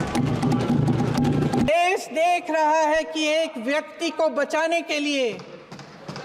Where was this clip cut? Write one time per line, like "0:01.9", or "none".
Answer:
0:01.7

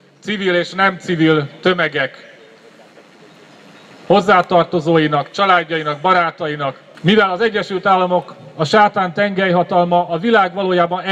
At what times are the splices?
0:06.9

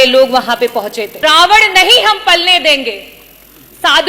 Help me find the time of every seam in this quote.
0:01.2

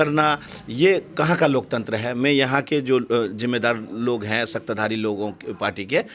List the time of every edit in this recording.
none

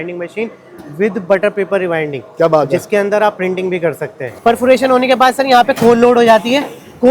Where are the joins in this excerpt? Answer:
0:04.2

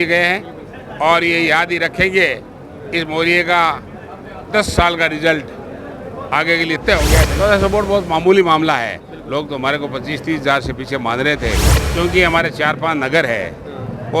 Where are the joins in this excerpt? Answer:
0:07.3
0:11.8

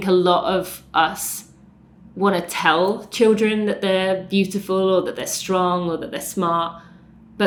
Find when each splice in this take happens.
none

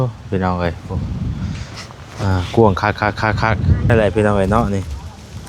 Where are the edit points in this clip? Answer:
0:03.9

